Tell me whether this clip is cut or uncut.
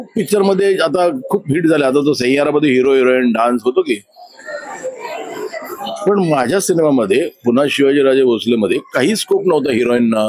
uncut